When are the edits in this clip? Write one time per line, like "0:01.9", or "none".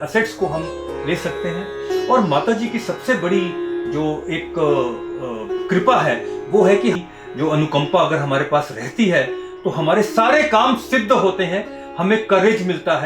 0:07.0

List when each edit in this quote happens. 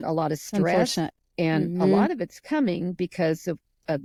none

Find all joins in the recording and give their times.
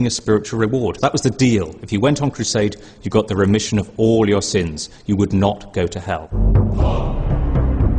none

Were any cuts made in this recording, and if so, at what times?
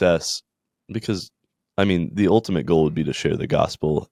none

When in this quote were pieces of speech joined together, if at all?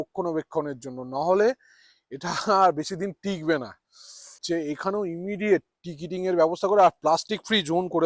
0:04.4

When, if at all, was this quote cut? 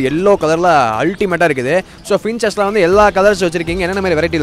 0:01.9

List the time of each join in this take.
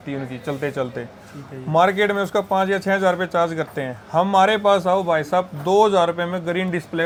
none

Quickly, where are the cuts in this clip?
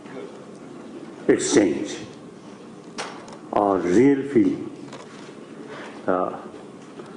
none

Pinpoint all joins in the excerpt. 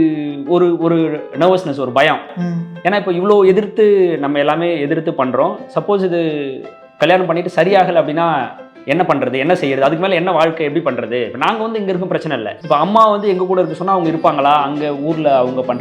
0:12.7

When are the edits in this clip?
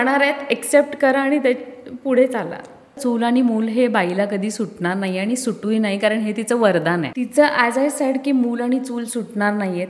0:03.0
0:07.1

